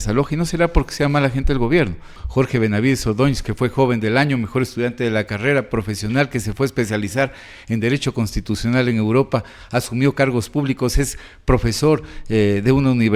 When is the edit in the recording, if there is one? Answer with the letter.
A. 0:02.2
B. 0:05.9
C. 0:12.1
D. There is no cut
A